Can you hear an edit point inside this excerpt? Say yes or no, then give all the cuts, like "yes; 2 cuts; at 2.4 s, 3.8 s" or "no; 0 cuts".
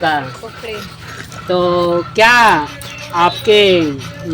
no; 0 cuts